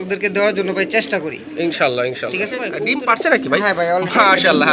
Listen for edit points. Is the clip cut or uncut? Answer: cut